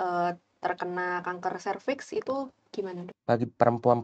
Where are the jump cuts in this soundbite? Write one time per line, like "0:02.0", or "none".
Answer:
0:03.1